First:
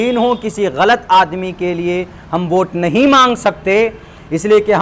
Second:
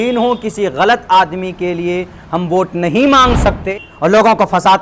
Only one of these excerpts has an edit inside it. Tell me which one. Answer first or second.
second